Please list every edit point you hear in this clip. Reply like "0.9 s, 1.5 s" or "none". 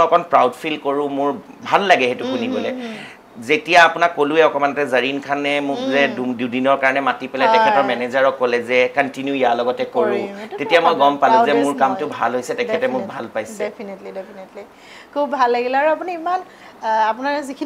none

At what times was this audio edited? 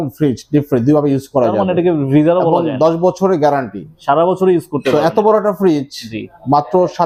none

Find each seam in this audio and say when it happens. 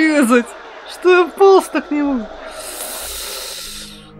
none

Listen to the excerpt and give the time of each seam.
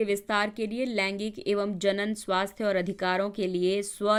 none

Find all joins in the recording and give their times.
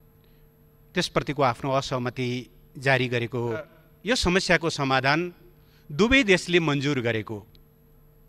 3.8 s

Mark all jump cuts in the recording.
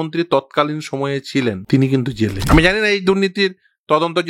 1.6 s, 2.4 s

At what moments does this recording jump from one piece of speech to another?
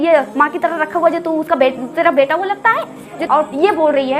3.2 s

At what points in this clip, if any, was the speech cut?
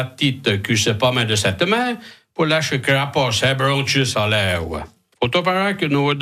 5.0 s

